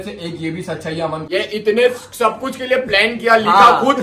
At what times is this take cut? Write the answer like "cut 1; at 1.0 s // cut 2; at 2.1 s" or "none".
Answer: cut 1; at 1.2 s